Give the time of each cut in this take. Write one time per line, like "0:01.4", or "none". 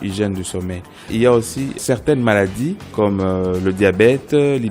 0:01.1
0:01.8
0:02.9